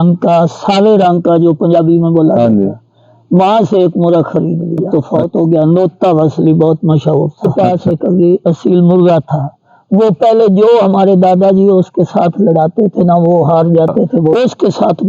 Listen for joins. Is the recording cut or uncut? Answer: cut